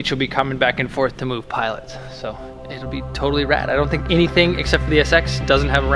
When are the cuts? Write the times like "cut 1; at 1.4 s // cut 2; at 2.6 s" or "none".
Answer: none